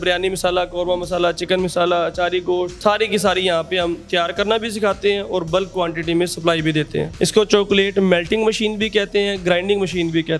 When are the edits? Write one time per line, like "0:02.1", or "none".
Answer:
0:02.7
0:07.1